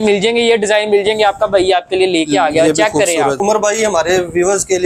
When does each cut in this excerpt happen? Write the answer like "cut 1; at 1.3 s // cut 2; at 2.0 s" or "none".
cut 1; at 3.4 s